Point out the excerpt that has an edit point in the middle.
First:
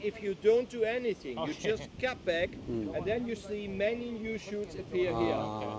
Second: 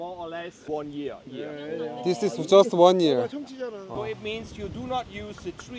second; 1 cut; at 4.0 s

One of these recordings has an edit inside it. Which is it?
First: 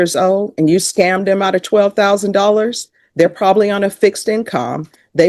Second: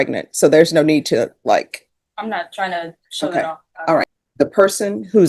second; 1 cut; at 4.1 s

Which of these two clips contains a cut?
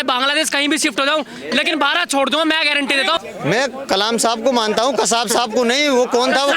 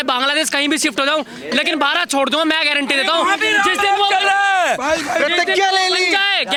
first; 1 cut; at 3.2 s

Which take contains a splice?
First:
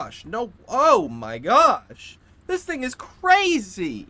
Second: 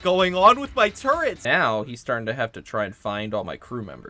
second; 1 cut; at 1.4 s

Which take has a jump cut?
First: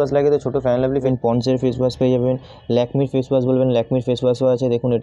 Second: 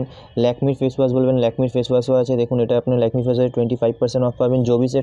first; 1 cut; at 1.1 s

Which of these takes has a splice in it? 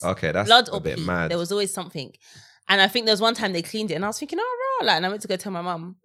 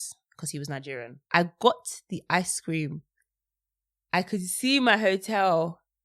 second; 1 cut; at 1.2 s

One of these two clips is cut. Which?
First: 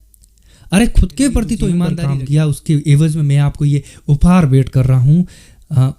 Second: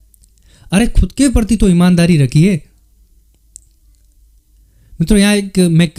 first; 1 cut; at 1.9 s

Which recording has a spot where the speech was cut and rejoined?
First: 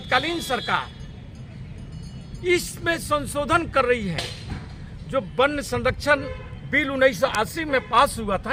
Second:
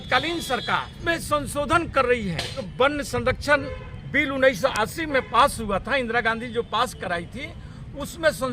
second; 2 cuts; at 0.9 s, 2.6 s

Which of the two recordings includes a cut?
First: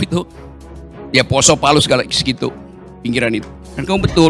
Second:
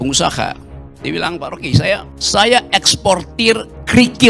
second; 1 cut; at 2.1 s

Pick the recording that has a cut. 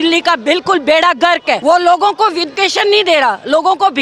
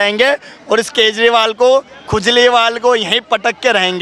first; 2 cuts; at 1.6 s, 2.5 s

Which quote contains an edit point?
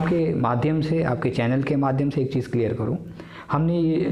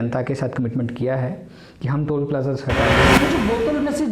second; 1 cut; at 3.1 s

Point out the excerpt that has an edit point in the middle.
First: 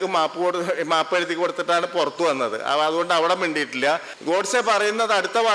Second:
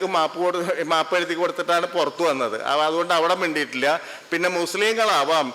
first; 1 cut; at 4.1 s

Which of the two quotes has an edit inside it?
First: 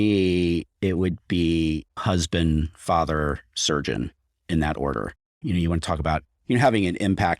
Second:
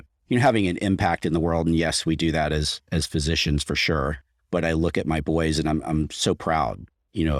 first; 2 cuts; at 1.9 s, 5.3 s

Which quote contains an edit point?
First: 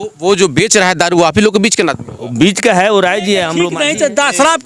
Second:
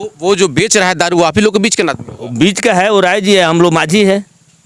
first; 1 cut; at 3.6 s

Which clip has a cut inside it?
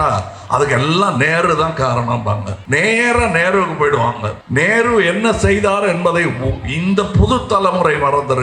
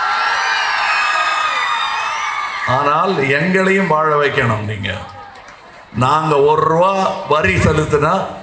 first; 2 cuts; at 2.5 s, 4.3 s

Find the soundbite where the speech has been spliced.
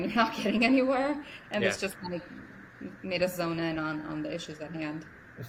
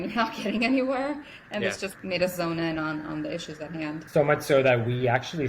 second; 2 cuts; at 2.0 s, 4.0 s

